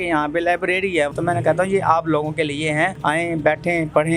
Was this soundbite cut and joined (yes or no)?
yes